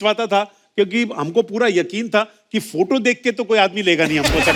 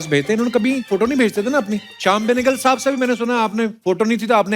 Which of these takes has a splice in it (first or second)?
second